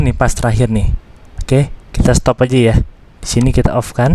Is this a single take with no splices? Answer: yes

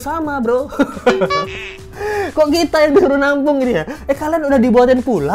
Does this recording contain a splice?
no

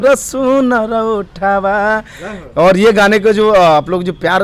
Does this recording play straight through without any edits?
yes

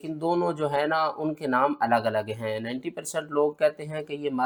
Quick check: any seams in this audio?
no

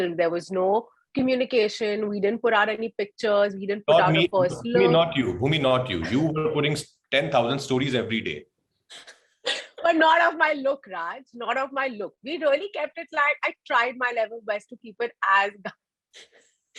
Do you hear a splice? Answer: no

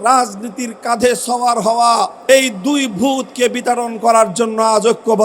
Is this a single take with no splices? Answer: no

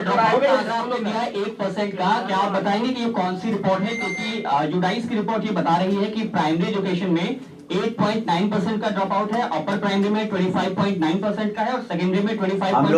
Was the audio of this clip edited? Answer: no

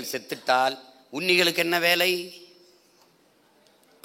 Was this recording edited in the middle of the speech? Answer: no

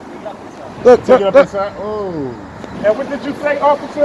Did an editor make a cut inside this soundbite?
yes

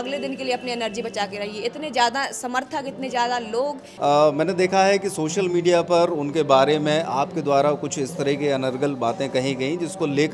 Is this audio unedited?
no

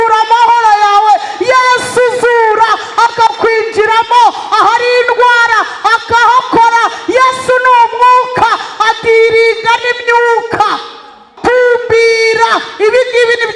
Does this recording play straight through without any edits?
no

